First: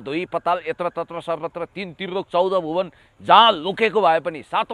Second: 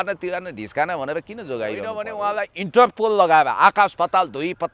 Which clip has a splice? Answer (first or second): second